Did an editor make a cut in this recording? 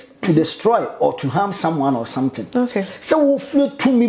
no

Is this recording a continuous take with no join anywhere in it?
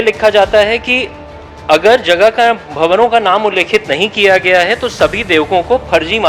yes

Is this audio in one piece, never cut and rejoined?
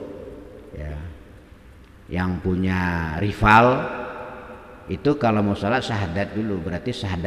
yes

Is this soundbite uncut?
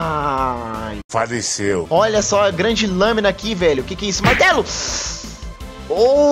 no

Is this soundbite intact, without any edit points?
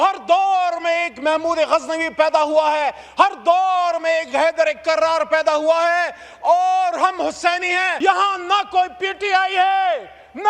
no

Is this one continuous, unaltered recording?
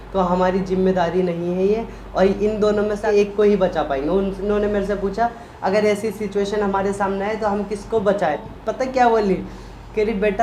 no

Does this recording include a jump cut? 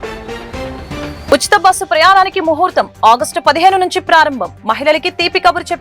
yes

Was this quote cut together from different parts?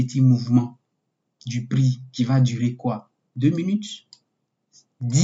no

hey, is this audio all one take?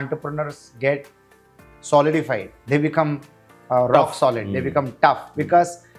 yes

